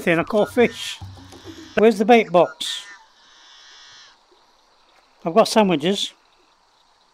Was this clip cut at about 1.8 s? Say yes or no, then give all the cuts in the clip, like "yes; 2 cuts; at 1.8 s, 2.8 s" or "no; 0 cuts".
yes; 1 cut; at 1.8 s